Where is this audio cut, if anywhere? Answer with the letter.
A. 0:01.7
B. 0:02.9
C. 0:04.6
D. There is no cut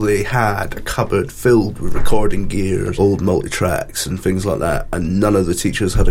B